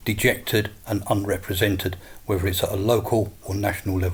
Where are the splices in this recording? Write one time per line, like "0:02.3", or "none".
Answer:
none